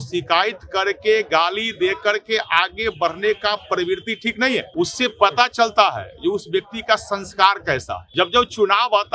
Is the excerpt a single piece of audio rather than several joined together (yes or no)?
no